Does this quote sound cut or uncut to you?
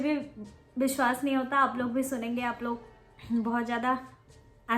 uncut